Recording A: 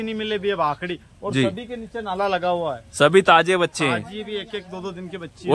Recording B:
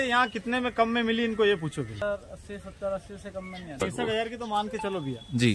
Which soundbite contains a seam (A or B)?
B